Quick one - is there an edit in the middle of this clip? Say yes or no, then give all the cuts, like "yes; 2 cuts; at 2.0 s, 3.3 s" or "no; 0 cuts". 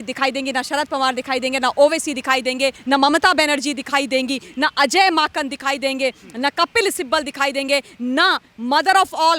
yes; 1 cut; at 2.8 s